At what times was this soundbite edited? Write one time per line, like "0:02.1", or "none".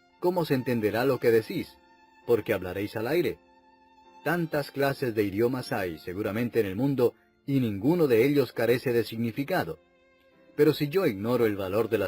0:01.0